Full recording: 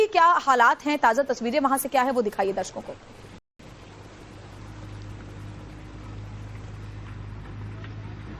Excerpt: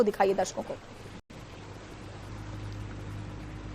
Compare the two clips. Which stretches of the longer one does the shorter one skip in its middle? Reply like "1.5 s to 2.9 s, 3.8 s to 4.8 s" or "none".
3.5 s to 3.6 s